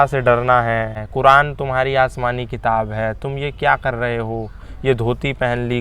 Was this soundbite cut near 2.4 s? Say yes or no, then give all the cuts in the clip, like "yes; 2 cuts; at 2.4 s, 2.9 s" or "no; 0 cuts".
no; 1 cut; at 1.0 s